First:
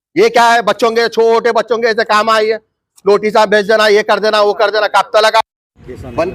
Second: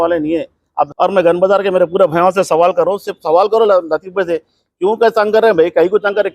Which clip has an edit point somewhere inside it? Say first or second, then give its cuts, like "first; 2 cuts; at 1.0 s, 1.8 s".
second; 1 cut; at 0.9 s